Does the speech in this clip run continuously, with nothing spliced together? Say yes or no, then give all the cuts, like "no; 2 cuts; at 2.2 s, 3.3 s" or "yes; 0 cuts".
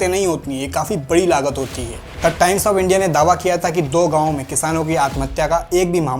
no; 1 cut; at 2.0 s